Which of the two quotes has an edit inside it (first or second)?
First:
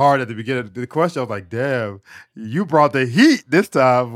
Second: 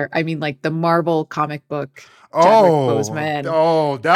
second